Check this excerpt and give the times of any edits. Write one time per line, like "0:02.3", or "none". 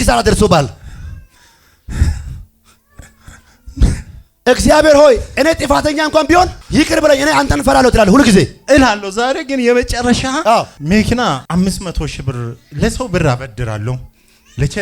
0:06.6
0:10.5
0:11.4